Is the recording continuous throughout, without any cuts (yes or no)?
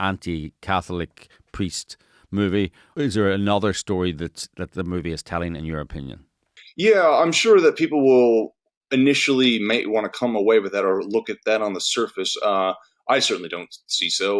no